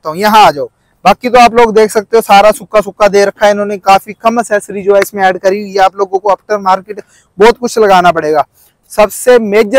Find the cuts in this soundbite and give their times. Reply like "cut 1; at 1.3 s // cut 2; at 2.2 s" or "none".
none